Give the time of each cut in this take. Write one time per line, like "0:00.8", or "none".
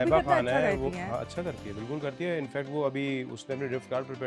none